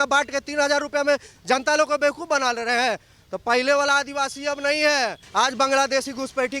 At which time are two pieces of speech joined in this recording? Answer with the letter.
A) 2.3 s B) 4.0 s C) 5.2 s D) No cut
C